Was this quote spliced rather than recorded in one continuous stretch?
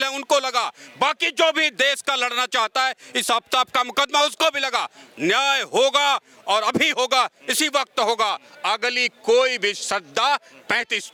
no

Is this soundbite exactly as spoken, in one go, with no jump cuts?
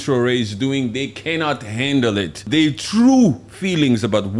no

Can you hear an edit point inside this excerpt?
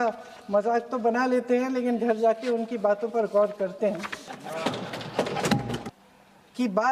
yes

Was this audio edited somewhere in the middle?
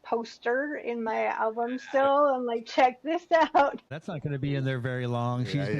yes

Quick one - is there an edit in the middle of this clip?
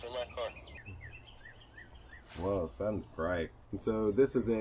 yes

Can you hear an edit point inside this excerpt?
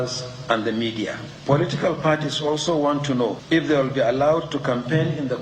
yes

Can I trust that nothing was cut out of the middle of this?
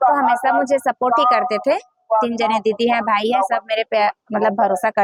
yes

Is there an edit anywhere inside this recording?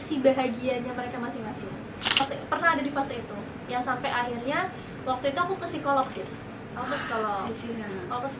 yes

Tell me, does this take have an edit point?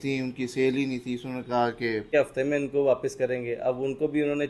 yes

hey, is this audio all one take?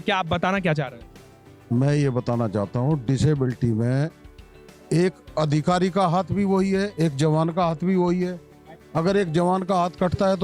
yes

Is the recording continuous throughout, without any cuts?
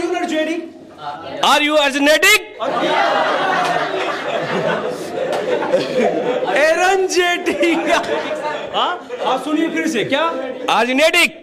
yes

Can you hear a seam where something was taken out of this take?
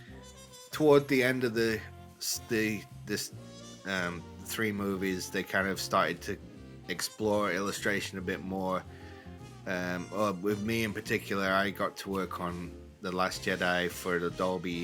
no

